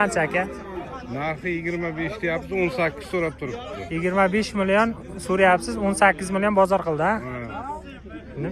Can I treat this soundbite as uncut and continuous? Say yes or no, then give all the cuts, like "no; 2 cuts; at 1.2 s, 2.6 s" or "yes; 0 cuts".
yes; 0 cuts